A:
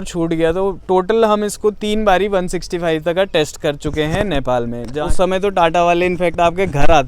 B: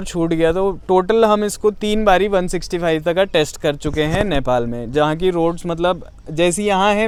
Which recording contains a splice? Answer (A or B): A